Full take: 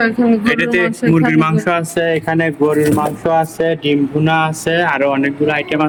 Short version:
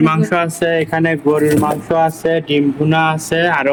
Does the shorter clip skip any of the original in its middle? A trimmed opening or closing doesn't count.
no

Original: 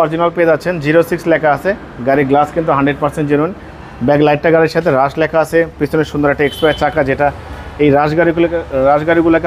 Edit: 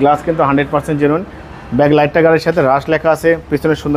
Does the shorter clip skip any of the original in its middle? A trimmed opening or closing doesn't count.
no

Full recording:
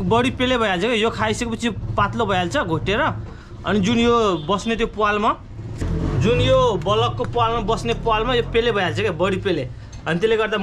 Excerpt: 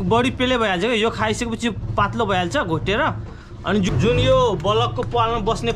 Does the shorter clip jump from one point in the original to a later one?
yes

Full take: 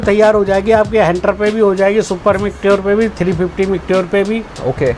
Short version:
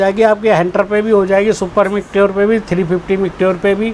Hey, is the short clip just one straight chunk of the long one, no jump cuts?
yes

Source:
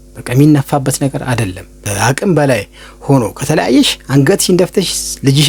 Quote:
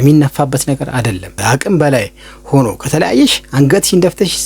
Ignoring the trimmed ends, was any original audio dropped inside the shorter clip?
yes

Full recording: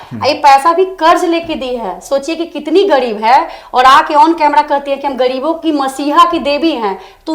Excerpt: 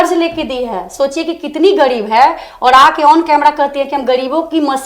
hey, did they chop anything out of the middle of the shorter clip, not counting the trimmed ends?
no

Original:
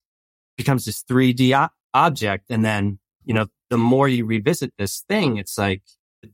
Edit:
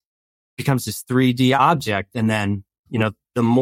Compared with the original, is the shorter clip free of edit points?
no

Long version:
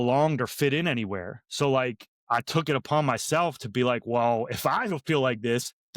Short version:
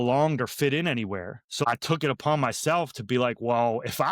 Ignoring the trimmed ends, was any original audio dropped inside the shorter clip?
yes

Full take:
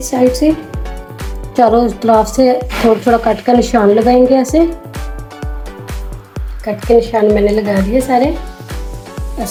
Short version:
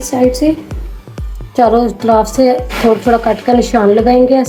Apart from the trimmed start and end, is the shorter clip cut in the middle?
no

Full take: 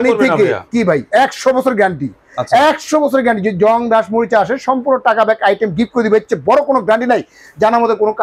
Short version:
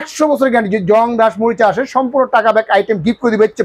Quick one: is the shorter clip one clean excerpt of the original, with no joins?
yes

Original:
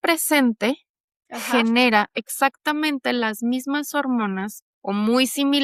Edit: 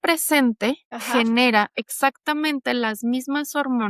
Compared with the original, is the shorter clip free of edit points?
no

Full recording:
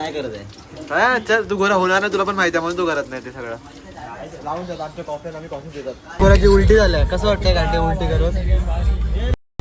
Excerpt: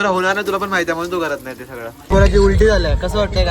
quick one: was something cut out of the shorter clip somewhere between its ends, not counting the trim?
yes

